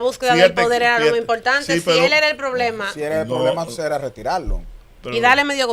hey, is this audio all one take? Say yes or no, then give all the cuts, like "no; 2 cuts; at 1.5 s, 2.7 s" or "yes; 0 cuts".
yes; 0 cuts